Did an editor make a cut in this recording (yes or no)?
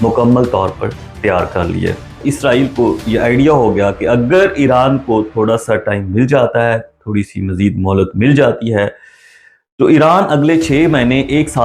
yes